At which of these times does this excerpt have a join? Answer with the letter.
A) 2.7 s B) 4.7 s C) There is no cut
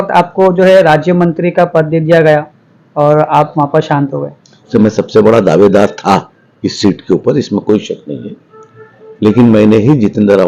B